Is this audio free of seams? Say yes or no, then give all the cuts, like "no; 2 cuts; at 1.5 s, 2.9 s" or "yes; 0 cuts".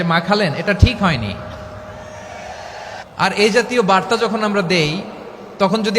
no; 1 cut; at 3.0 s